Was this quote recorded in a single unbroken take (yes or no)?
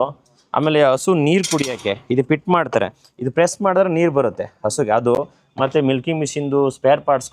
yes